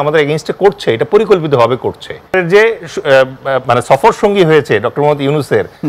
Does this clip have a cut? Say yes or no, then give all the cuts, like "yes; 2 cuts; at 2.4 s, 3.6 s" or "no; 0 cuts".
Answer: yes; 1 cut; at 2.3 s